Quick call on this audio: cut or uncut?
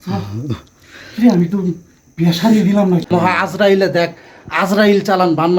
cut